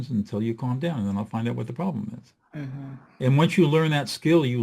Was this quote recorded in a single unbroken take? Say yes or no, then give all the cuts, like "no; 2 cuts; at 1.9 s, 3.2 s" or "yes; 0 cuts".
no; 1 cut; at 3.0 s